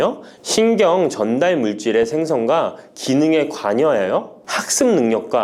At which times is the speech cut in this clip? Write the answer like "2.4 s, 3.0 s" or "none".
none